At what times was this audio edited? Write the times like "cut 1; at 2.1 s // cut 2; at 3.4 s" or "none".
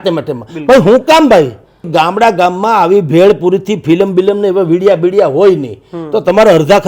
cut 1; at 1.9 s